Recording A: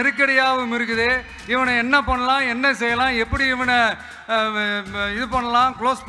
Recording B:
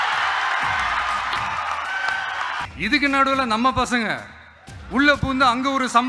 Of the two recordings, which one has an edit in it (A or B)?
B